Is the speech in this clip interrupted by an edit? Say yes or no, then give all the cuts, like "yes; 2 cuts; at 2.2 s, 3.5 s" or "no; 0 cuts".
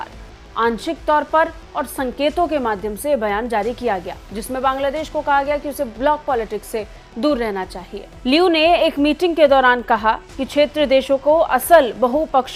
no; 0 cuts